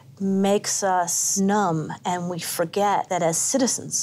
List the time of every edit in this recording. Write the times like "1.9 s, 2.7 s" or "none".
1.3 s, 3.1 s